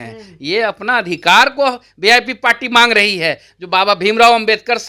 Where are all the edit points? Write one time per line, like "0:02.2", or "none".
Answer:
none